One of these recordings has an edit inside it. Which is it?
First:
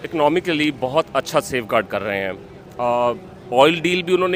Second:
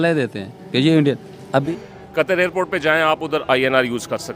second; 1 cut; at 1.6 s

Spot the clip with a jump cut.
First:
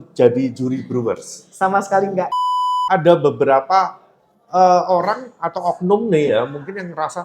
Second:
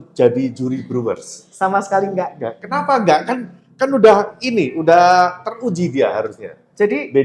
first; 1 cut; at 2.6 s

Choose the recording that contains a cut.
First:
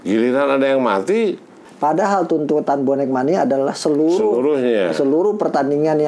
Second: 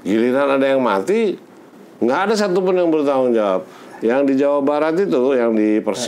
first; 1 cut; at 1.6 s

